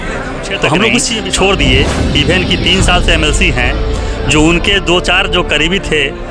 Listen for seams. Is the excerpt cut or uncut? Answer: cut